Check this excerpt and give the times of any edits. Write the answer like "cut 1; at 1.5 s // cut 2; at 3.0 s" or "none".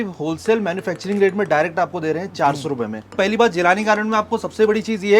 cut 1; at 3.2 s